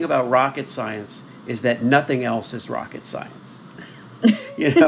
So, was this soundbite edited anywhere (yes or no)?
no